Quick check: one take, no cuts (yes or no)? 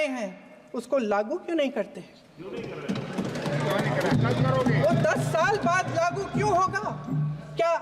yes